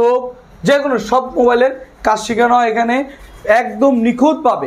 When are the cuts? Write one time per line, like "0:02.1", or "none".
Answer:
none